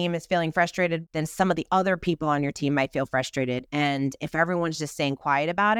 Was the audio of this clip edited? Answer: yes; 2 cuts; at 1.0 s, 3.7 s

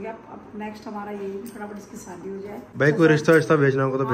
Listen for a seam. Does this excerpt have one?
yes; 1 cut; at 2.7 s

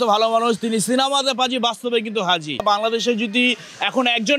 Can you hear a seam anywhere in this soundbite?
yes; 1 cut; at 2.6 s

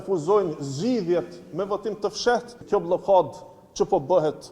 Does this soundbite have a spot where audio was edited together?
yes; 1 cut; at 2.5 s

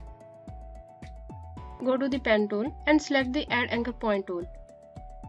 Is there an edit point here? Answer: no; 0 cuts

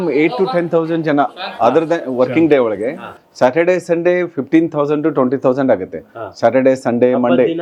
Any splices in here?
no; 0 cuts

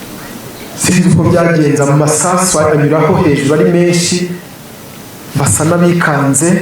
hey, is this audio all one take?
yes; 0 cuts

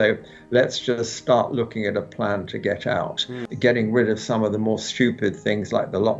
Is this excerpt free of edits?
no; 1 cut; at 3.4 s

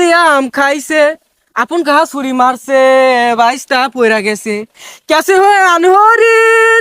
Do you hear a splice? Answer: no; 0 cuts

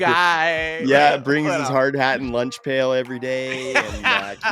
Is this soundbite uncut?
yes; 0 cuts

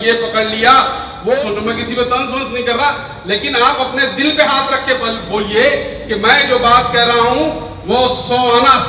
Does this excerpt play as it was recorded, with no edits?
no; 1 cut; at 1.4 s

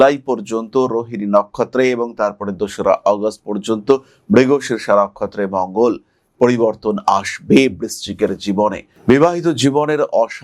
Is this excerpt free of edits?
no; 1 cut; at 8.9 s

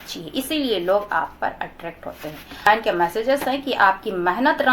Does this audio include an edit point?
yes; 1 cut; at 2.7 s

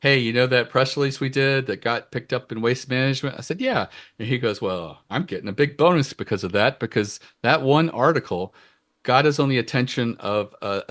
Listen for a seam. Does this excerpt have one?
no; 0 cuts

